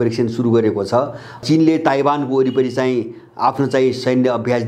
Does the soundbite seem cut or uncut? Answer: cut